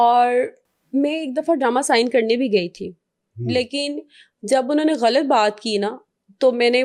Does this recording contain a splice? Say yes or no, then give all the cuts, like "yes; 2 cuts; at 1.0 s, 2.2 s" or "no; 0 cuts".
no; 0 cuts